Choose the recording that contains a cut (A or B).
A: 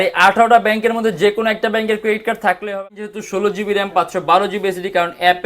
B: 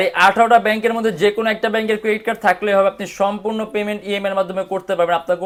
A